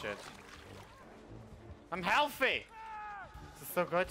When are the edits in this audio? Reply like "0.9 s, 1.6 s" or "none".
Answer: 1.0 s